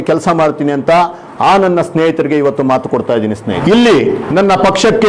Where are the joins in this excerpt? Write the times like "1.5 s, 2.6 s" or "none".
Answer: 3.5 s, 4.2 s